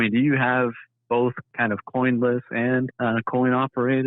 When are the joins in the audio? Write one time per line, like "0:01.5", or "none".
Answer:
0:01.5
0:02.9